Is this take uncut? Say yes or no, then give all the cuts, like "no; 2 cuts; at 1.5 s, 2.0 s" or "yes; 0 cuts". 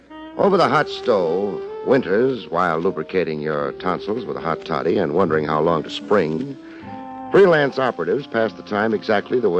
yes; 0 cuts